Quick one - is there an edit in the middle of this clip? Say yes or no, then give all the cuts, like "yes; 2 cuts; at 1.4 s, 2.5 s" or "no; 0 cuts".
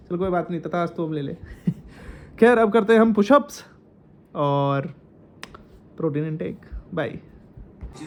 no; 0 cuts